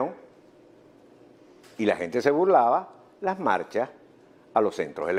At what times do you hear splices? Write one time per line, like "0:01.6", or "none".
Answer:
none